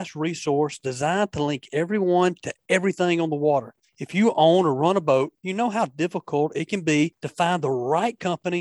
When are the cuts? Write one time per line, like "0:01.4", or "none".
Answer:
0:05.4
0:07.2